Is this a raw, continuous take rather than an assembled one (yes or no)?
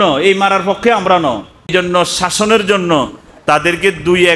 no